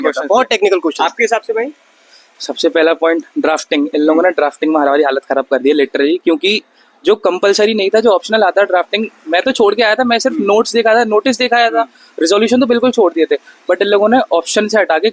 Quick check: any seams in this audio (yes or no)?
no